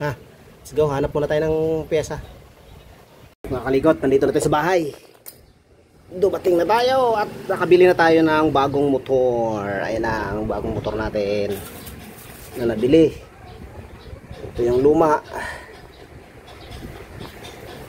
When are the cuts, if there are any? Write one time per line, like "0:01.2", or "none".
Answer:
0:03.5

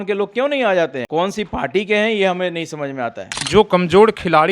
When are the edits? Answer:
0:01.0
0:03.3

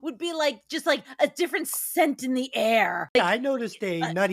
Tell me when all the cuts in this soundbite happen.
0:03.1

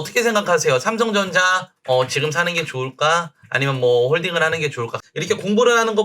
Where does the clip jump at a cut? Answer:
0:04.9

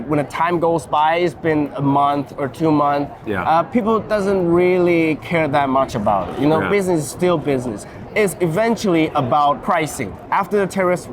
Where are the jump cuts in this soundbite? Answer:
0:10.2

